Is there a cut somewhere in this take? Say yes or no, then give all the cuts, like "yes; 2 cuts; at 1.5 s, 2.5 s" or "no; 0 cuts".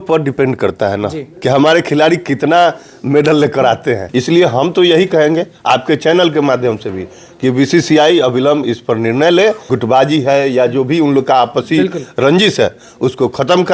yes; 2 cuts; at 4.0 s, 9.6 s